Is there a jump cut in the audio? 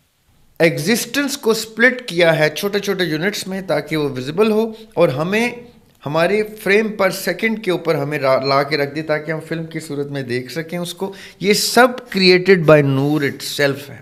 no; 0 cuts

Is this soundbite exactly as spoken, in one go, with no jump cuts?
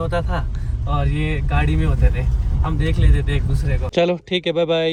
yes; 0 cuts

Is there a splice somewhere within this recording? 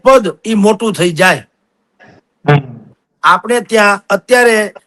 no; 0 cuts

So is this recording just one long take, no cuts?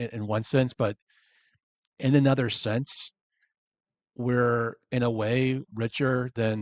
yes; 0 cuts

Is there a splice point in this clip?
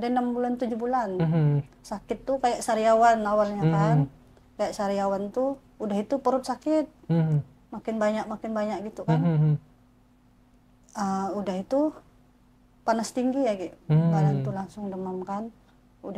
no; 0 cuts

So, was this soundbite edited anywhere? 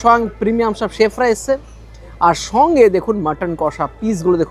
no; 0 cuts

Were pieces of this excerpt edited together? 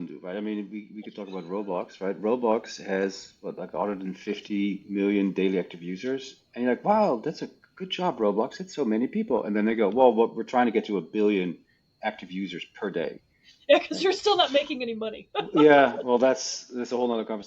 yes; 1 cut; at 15.3 s

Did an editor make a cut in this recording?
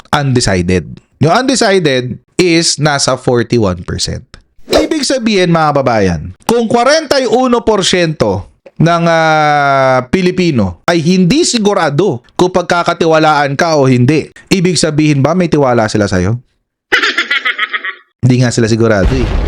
no; 0 cuts

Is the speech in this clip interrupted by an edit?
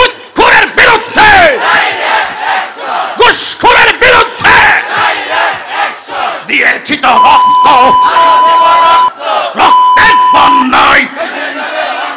no; 0 cuts

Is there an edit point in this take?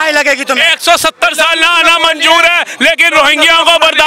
no; 0 cuts

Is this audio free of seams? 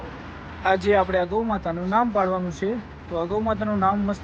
yes; 0 cuts

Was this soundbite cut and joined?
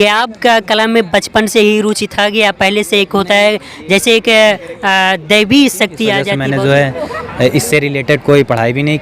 yes; 1 cut; at 6.3 s

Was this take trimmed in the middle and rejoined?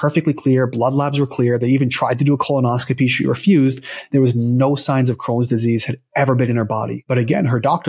yes; 1 cut; at 7.0 s

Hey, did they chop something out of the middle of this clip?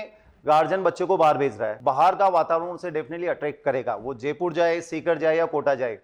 yes; 1 cut; at 1.7 s

